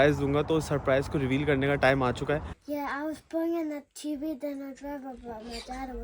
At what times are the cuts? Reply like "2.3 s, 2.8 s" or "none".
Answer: 2.6 s